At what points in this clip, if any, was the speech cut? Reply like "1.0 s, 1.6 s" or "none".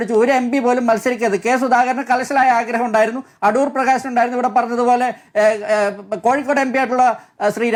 none